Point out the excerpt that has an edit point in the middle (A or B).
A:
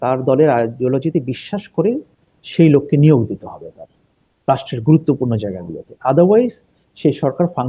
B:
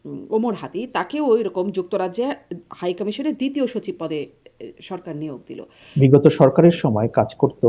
B